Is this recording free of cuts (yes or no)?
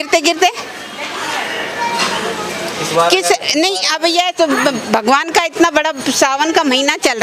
yes